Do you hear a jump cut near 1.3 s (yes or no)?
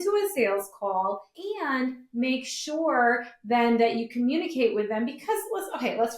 yes